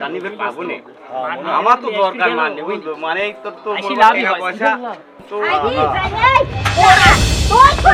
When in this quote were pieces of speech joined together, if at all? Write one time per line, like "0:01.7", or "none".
none